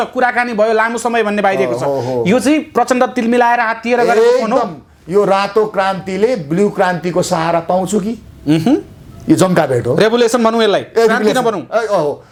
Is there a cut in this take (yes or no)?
no